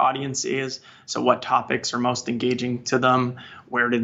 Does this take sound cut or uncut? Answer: uncut